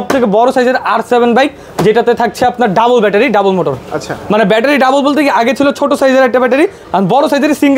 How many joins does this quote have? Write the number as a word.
zero